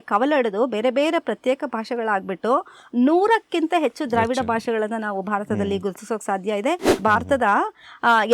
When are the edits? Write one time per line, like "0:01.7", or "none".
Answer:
0:06.9